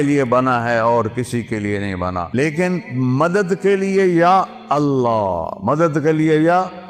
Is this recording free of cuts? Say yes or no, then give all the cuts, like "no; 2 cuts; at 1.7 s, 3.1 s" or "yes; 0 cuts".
no; 1 cut; at 2.4 s